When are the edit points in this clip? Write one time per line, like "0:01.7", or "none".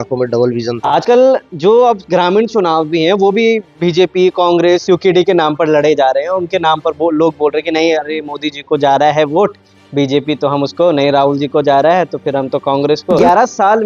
0:01.0
0:13.2